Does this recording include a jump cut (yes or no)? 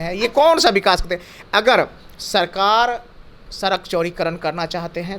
no